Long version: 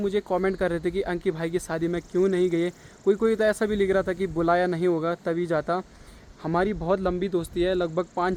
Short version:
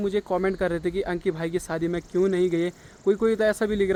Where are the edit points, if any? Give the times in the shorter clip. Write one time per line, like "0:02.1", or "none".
none